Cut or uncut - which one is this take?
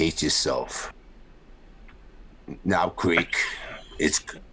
cut